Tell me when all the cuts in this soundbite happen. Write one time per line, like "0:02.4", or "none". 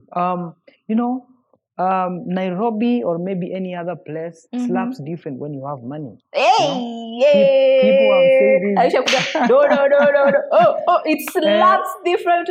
none